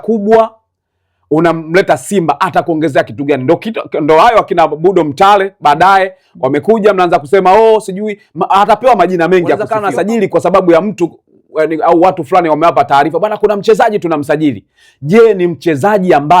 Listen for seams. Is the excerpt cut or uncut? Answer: cut